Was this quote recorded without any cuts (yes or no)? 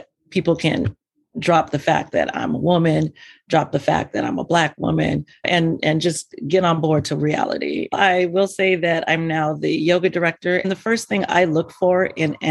no